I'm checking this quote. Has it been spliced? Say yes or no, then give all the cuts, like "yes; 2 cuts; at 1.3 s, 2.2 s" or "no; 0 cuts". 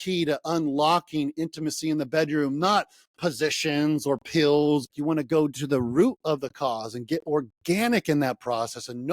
yes; 1 cut; at 4.8 s